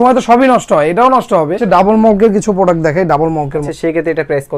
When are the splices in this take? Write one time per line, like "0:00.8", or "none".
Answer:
0:01.6
0:03.7